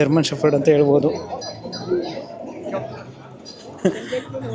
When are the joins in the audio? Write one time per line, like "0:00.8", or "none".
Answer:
none